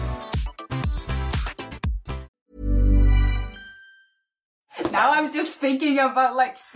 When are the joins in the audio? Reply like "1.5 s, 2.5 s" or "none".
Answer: 2.4 s, 4.7 s